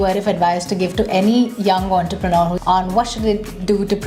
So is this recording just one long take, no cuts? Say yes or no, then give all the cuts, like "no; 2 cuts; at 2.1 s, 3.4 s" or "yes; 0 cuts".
no; 1 cut; at 2.6 s